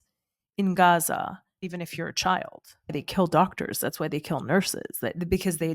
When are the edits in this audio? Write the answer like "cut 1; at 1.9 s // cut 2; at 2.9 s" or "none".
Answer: cut 1; at 1.6 s // cut 2; at 2.9 s